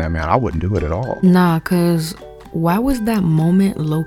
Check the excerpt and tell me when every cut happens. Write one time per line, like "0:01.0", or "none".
none